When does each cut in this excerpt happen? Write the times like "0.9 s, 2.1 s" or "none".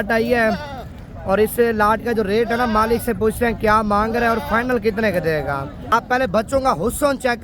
5.7 s